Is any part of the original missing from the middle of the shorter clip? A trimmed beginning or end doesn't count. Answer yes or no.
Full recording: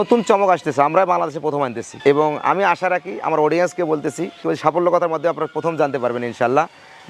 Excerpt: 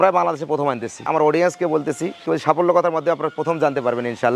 yes